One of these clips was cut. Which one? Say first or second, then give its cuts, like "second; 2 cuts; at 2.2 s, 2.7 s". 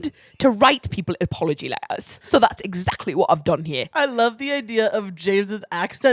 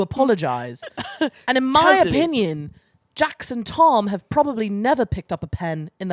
first; 2 cuts; at 2.1 s, 3.9 s